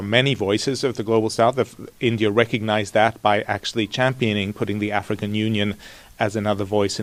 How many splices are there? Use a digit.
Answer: 0